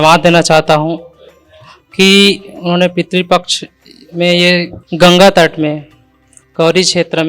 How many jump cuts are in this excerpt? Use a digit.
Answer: 1